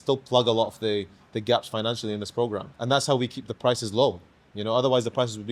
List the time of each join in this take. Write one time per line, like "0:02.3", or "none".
0:02.7

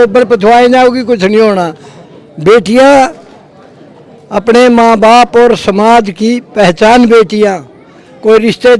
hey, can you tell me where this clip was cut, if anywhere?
none

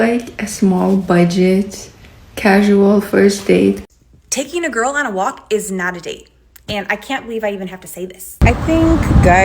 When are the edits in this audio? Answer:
0:03.8
0:08.4

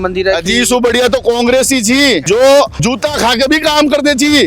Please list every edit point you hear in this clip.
0:02.2

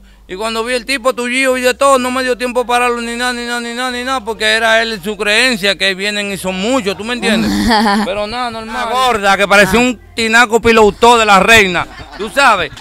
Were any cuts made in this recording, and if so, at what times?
0:08.9

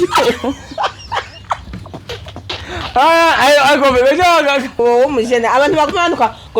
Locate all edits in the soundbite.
0:04.8

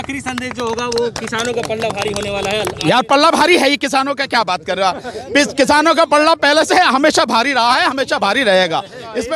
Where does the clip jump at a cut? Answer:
none

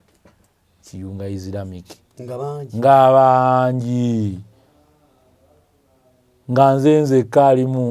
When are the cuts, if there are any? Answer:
none

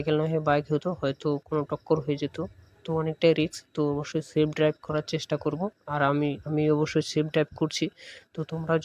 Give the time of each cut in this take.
none

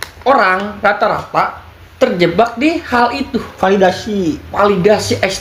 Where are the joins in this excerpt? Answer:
none

